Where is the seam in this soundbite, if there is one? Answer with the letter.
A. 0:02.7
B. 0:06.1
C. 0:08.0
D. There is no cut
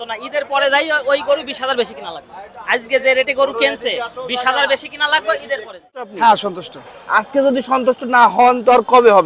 B